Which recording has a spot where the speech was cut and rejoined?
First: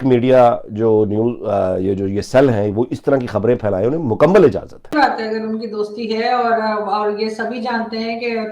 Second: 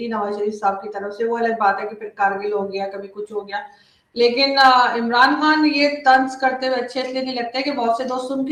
first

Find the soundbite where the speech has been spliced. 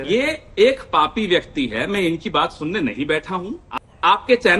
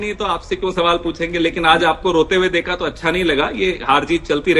first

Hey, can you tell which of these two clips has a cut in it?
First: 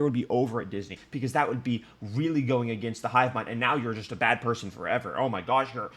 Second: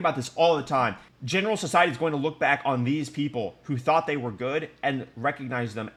first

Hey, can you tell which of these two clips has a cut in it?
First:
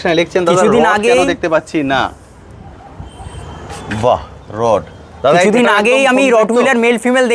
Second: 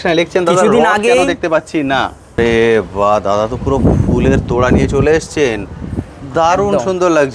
second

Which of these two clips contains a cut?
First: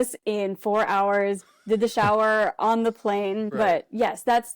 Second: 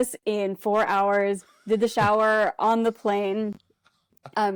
first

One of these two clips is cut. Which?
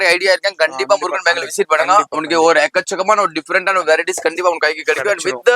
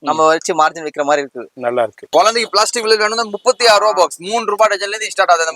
second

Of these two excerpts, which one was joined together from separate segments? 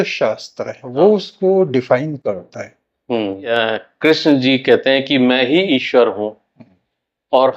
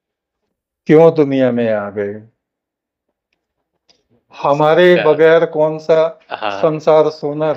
first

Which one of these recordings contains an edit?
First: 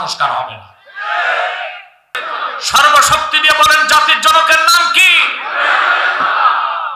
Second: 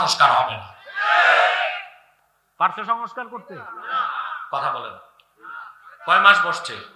first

